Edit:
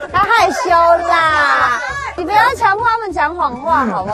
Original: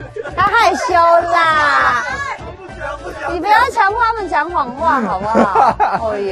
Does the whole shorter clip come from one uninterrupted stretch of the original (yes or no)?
no